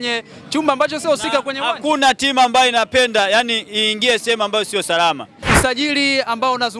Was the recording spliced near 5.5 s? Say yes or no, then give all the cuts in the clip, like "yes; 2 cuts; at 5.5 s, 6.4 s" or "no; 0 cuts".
yes; 1 cut; at 5.5 s